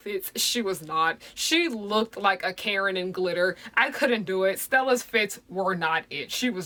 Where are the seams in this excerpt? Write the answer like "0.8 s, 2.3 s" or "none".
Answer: none